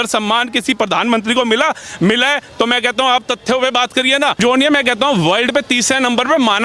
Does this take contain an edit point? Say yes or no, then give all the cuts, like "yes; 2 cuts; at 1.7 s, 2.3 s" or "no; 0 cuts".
no; 0 cuts